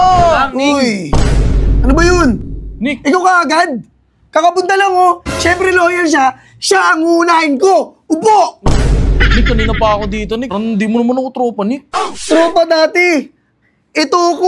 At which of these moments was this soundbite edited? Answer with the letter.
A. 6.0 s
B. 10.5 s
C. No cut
B